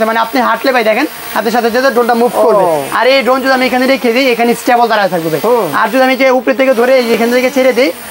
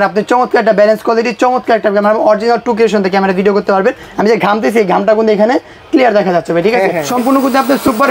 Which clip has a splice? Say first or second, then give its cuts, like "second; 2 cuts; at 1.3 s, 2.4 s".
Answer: second; 1 cut; at 7.0 s